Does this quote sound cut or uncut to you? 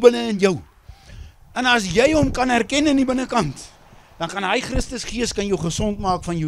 uncut